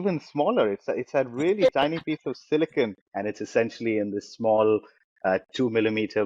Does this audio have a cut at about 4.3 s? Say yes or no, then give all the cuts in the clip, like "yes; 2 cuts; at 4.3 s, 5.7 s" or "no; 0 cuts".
no; 1 cut; at 3.0 s